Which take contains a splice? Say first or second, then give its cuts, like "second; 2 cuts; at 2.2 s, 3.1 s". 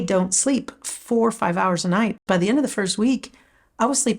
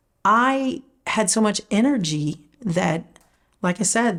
first; 1 cut; at 2.2 s